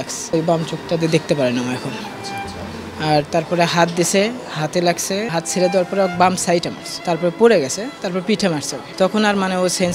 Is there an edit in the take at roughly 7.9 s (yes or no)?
no